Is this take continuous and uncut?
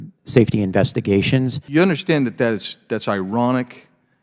no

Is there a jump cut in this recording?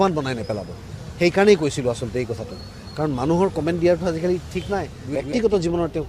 yes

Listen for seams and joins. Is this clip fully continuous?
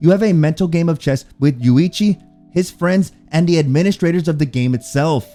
yes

